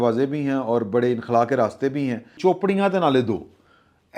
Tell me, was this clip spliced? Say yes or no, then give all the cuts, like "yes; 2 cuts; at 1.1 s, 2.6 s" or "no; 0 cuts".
yes; 1 cut; at 2.3 s